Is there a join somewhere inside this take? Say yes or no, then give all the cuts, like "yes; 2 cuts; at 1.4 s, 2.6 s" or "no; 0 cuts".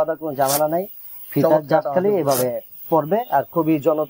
no; 0 cuts